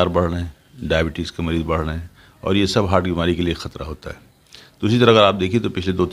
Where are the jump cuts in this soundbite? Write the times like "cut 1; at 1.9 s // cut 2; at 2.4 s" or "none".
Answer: none